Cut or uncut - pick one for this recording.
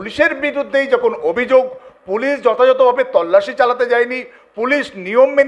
uncut